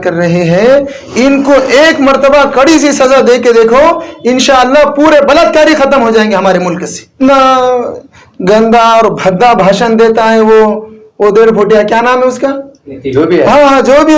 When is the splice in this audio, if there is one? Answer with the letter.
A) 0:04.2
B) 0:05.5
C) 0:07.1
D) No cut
C